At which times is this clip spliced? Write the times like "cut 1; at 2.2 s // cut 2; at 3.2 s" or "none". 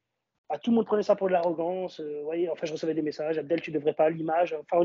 none